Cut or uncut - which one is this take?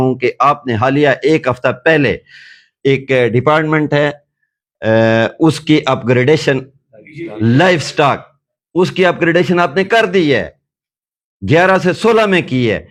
uncut